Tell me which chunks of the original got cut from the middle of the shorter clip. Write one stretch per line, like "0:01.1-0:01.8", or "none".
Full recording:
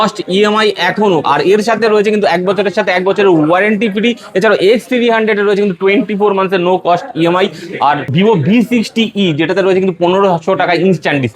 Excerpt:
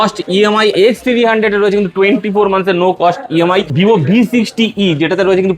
0:00.7-0:04.6
0:07.6-0:08.1

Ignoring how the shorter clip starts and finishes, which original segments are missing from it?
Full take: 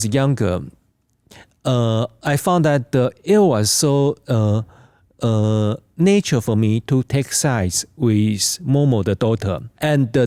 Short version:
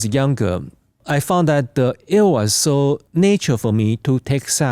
0:01.0-0:02.1
0:04.2-0:05.9

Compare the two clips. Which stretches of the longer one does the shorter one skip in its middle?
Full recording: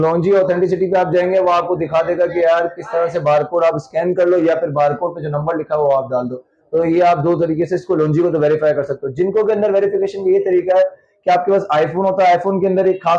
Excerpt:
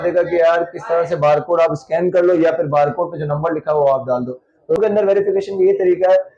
0:06.8-0:09.4

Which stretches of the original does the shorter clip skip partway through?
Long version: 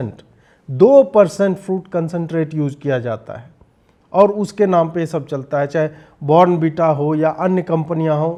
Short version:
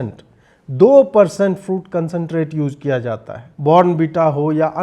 0:03.4-0:06.1

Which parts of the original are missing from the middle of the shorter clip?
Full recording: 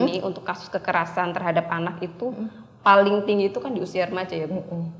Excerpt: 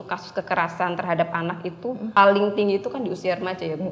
0:02.5-0:02.8

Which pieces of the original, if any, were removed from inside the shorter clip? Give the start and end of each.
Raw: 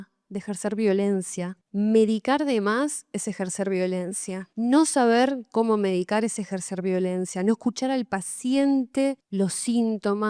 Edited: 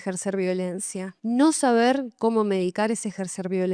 none

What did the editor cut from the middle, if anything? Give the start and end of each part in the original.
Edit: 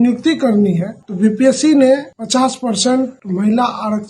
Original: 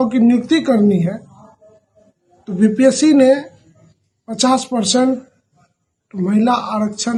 0:01.2-0:02.4
0:03.5-0:04.2
0:05.3-0:06.1

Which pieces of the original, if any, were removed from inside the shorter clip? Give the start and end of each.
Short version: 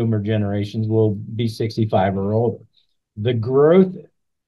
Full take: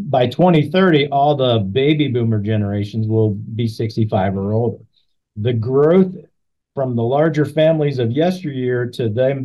none

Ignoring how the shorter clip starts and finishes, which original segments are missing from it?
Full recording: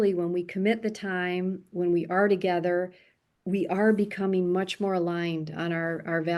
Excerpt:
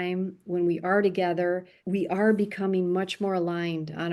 0:03.0-0:03.3

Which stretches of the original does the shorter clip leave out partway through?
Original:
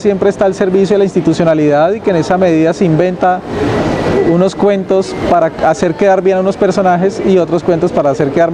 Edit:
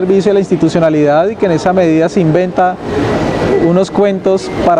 none

